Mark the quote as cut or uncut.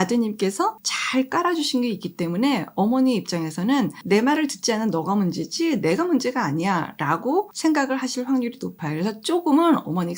cut